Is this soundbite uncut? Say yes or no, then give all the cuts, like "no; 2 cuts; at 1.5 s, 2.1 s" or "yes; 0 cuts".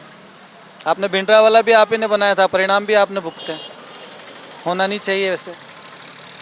yes; 0 cuts